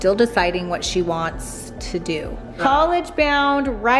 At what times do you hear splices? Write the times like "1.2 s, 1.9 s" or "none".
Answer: 2.6 s